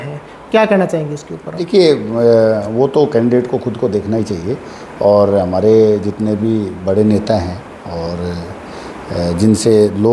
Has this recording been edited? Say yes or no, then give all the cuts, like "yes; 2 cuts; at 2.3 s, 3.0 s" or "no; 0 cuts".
no; 0 cuts